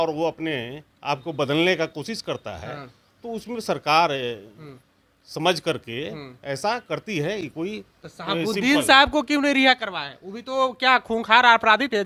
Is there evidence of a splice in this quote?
no; 0 cuts

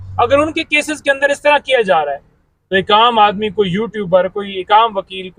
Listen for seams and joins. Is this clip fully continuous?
yes; 0 cuts

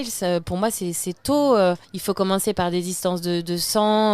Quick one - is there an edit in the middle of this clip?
yes; 1 cut; at 1.9 s

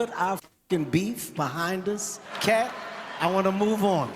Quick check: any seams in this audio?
yes; 1 cut; at 2.1 s

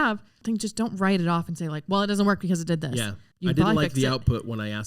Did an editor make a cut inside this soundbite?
yes; 1 cut; at 3.2 s

